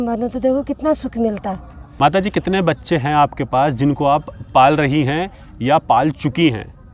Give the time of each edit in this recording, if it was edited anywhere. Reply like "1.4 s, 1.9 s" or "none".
1.8 s